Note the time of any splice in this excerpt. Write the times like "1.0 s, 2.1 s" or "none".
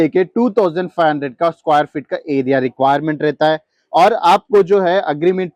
none